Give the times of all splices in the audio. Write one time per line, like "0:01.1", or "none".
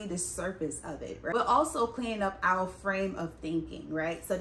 0:01.3